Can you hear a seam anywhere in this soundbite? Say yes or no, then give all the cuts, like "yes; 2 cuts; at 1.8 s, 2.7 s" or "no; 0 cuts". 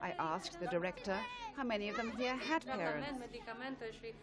yes; 1 cut; at 1.4 s